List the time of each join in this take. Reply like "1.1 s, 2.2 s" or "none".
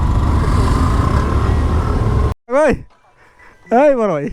2.4 s